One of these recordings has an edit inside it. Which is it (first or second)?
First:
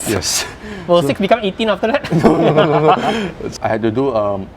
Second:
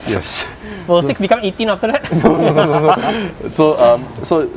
first